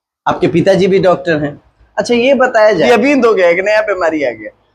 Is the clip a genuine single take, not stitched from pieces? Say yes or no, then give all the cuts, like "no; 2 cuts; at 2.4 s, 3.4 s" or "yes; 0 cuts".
no; 1 cut; at 2.8 s